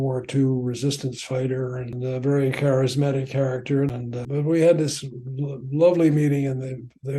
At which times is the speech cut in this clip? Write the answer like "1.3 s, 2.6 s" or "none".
1.9 s, 3.9 s